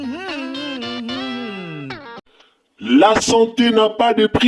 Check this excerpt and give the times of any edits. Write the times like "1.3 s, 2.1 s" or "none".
2.2 s